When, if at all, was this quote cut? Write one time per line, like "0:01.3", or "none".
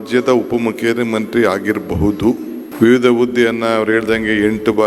0:02.6